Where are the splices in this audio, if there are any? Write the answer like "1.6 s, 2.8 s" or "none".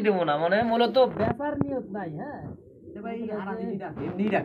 none